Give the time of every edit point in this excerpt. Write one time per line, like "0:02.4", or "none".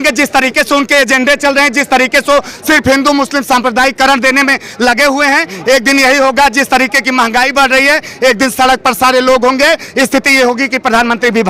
none